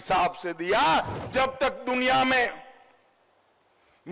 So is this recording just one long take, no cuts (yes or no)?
no